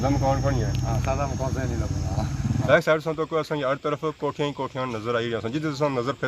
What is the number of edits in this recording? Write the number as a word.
one